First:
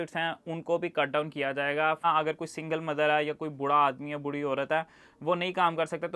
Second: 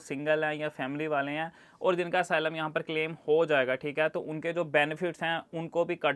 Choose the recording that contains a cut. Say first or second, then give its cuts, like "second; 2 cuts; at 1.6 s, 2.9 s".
first; 1 cut; at 2.0 s